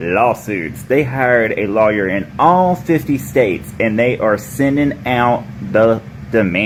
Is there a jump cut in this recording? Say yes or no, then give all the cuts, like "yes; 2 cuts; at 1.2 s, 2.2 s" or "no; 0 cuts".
no; 0 cuts